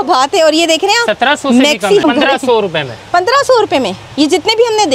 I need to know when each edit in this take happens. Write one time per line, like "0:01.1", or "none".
0:02.0